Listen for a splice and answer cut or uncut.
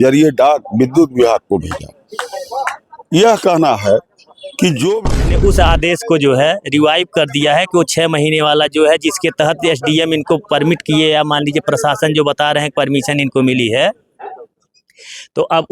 cut